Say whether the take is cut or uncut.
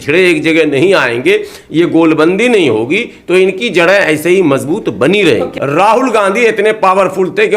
cut